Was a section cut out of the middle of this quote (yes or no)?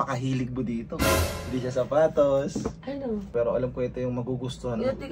yes